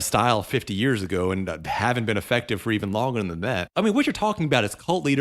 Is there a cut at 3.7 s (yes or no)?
yes